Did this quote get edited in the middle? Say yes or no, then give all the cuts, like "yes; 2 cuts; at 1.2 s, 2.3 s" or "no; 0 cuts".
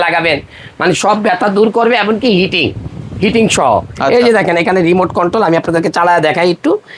no; 0 cuts